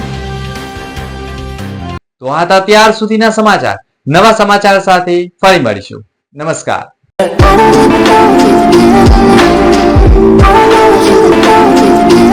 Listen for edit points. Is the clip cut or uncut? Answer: uncut